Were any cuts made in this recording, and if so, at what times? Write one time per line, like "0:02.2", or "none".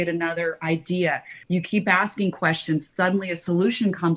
0:01.3